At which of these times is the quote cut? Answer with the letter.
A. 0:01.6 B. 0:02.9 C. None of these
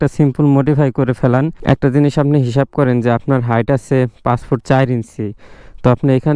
A